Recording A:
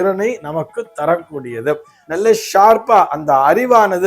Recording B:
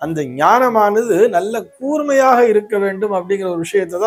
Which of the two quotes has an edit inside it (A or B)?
A